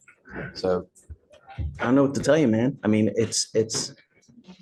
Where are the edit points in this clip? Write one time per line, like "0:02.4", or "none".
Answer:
none